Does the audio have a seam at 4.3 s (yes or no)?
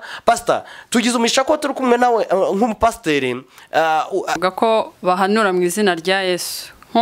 yes